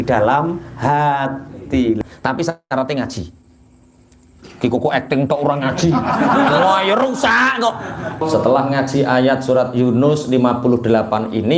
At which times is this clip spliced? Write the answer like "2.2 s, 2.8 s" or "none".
2.0 s, 8.1 s